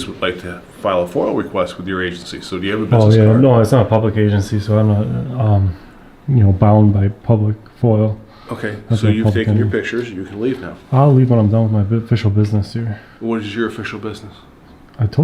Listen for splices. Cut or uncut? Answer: uncut